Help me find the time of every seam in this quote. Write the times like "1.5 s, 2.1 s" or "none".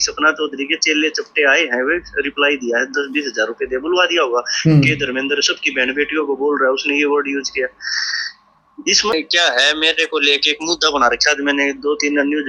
9.1 s